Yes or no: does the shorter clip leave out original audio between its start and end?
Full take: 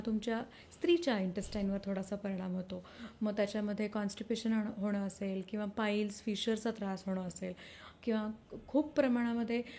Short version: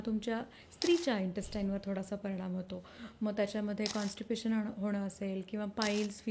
no